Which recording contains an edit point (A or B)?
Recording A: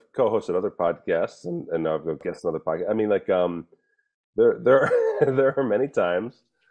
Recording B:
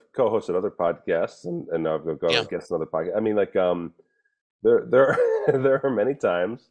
A